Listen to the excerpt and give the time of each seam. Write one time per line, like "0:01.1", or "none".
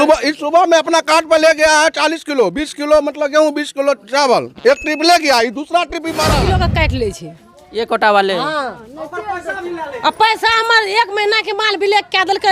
0:06.4